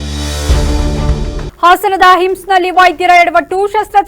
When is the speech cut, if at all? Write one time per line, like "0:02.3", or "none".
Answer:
0:01.5